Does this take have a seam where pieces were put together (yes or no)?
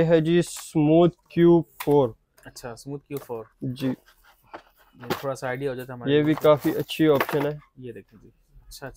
no